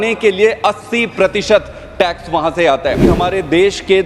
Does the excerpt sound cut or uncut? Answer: cut